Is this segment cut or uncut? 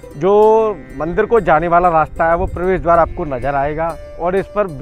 uncut